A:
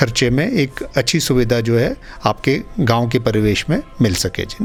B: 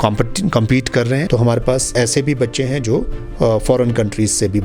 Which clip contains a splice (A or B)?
B